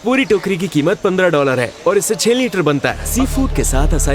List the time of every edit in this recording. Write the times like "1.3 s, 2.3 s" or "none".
3.0 s